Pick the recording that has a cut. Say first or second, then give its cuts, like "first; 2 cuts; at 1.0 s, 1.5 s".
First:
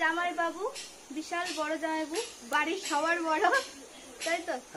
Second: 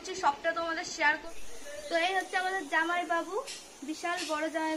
second; 1 cut; at 1.5 s